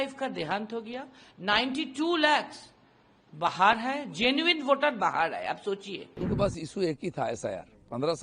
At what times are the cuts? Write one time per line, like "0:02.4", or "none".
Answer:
0:06.2